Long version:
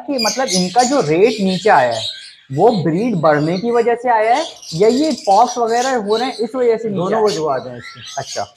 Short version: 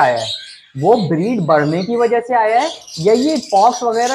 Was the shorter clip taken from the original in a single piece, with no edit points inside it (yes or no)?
yes